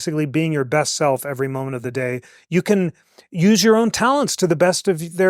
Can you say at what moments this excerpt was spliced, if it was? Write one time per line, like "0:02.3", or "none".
none